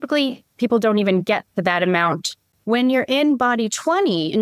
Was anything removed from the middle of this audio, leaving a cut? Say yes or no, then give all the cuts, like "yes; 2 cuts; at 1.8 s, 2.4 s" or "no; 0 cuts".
yes; 1 cut; at 2.4 s